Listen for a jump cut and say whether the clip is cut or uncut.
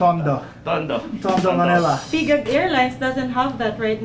cut